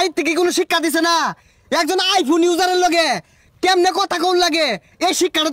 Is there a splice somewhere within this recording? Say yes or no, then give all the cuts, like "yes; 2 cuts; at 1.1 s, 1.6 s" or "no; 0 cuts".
no; 0 cuts